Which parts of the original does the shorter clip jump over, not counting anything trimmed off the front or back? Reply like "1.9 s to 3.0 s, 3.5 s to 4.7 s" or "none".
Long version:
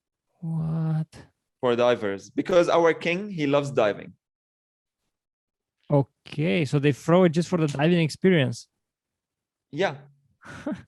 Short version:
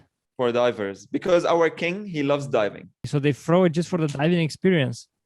4.3 s to 6.7 s